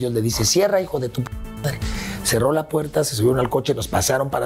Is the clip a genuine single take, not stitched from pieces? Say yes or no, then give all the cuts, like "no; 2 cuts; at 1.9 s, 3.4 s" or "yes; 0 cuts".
yes; 0 cuts